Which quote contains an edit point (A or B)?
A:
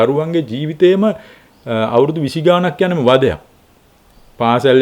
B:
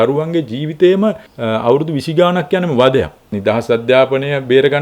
B